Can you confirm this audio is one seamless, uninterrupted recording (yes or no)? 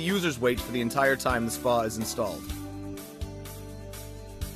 no